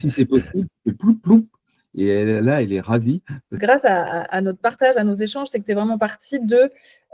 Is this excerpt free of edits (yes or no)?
no